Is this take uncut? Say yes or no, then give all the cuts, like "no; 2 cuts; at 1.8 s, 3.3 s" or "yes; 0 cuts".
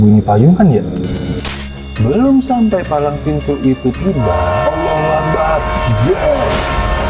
no; 1 cut; at 1.3 s